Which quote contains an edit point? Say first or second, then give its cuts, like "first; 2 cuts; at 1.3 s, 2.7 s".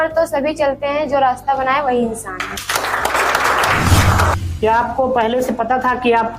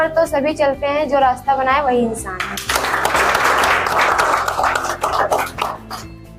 first; 1 cut; at 4.4 s